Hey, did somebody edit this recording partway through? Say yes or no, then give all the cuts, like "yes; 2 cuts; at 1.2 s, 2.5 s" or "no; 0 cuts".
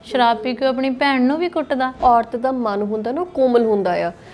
yes; 1 cut; at 2.0 s